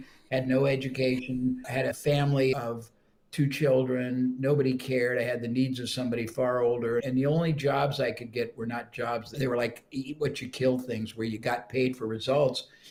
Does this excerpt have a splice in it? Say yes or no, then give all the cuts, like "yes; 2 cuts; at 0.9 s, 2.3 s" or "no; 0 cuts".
no; 0 cuts